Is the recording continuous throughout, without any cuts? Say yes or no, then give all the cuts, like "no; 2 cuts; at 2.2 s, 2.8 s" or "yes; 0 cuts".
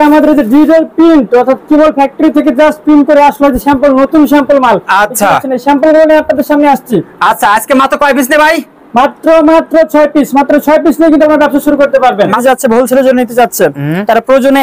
no; 1 cut; at 12.4 s